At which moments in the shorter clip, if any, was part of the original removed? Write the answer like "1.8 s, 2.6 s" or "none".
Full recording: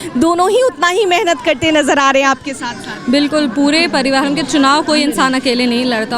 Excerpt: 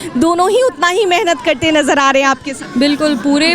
2.6 s